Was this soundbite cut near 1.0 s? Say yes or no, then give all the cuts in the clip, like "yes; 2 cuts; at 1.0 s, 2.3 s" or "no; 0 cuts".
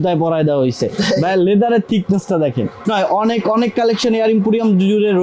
no; 1 cut; at 2.8 s